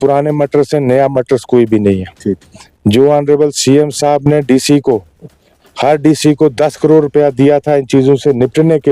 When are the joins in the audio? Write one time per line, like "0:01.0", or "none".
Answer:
none